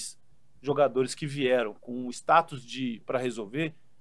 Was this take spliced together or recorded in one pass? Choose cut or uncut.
uncut